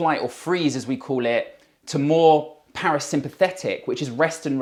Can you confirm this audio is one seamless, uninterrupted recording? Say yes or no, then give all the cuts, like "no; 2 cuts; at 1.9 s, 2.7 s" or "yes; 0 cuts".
yes; 0 cuts